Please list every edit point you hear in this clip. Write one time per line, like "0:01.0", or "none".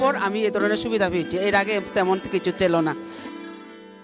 0:02.9